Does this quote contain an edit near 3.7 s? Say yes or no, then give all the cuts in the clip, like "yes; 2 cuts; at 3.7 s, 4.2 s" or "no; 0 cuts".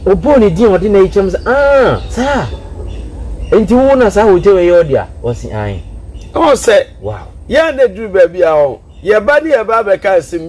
no; 0 cuts